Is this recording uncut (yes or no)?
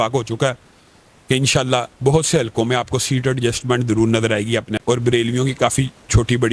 no